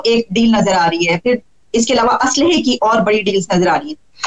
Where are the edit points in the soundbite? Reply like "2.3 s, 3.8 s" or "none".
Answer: none